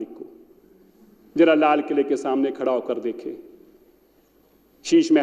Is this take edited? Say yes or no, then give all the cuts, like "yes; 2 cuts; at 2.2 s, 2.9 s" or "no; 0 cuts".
no; 0 cuts